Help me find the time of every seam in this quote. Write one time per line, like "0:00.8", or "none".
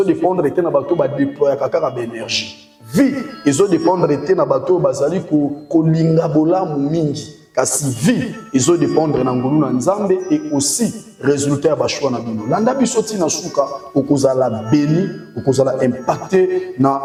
none